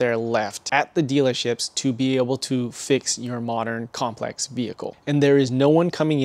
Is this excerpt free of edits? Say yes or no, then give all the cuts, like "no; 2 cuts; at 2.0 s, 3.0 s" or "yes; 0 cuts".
no; 1 cut; at 5.0 s